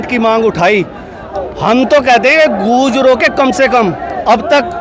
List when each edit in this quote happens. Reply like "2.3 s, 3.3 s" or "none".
1.1 s